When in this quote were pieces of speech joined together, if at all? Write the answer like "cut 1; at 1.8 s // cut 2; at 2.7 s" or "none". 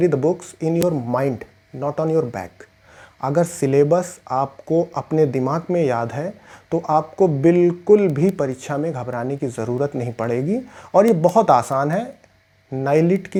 none